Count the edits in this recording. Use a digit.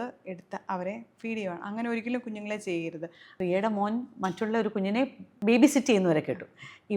2